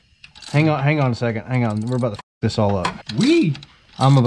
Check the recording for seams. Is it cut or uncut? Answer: uncut